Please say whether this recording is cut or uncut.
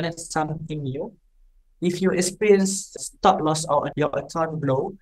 cut